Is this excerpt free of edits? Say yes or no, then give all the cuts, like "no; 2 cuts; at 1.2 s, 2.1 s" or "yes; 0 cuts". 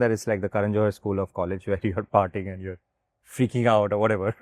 yes; 0 cuts